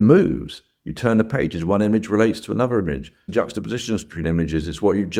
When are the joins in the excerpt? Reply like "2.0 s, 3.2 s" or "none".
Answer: none